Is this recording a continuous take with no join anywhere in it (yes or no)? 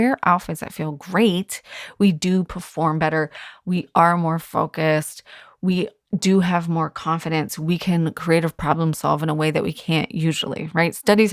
yes